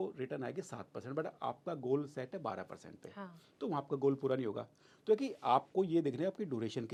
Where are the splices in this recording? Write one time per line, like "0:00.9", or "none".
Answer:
none